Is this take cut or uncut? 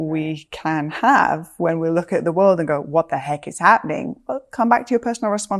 uncut